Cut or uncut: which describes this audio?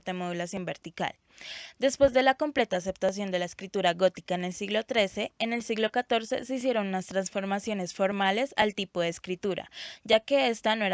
uncut